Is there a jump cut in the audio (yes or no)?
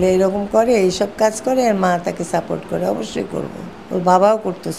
yes